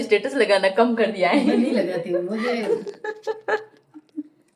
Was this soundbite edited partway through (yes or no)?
no